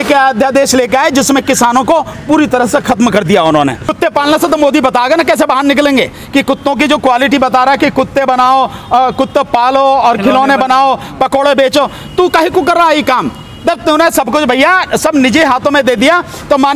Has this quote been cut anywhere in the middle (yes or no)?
yes